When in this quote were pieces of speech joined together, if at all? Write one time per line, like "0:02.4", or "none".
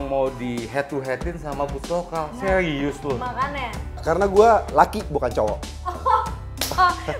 0:04.0